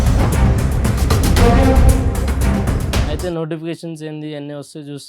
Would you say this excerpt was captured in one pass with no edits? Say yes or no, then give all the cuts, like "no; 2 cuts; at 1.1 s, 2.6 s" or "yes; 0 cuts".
no; 1 cut; at 3.1 s